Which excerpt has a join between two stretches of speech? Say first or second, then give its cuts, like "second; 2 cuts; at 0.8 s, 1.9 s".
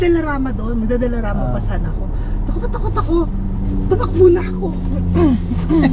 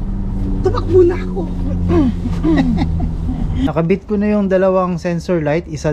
second; 1 cut; at 3.7 s